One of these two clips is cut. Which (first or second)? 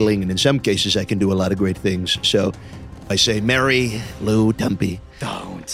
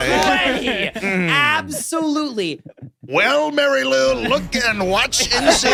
first